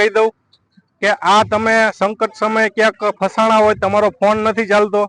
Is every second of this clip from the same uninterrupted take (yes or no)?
yes